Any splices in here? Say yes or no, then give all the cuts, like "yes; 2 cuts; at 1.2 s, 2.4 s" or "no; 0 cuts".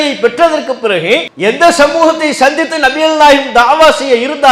yes; 1 cut; at 1.3 s